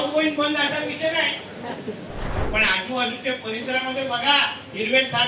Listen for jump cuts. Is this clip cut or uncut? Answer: cut